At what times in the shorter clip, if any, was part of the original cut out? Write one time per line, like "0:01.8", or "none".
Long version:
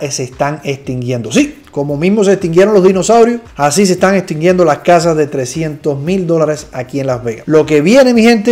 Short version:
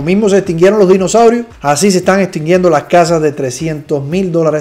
none